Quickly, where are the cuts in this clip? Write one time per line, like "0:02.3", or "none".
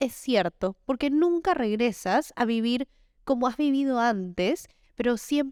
none